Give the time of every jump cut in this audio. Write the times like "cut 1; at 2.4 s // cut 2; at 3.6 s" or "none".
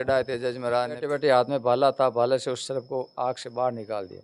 cut 1; at 1.1 s